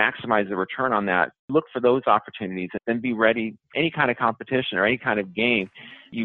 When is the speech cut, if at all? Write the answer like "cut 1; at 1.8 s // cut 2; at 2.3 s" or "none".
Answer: cut 1; at 1.4 s